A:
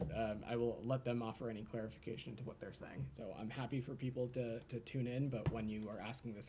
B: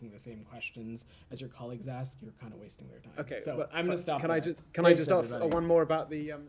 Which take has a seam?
A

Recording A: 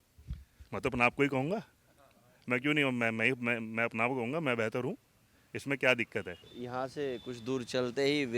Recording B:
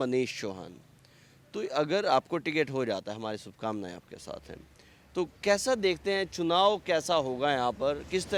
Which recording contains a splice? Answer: A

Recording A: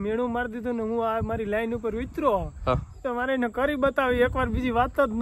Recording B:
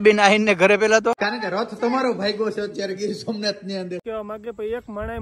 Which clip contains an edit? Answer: B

